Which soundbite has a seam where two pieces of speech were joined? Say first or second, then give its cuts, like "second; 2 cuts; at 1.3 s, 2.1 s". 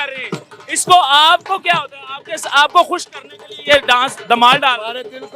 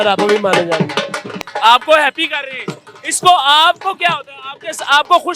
second; 1 cut; at 1.4 s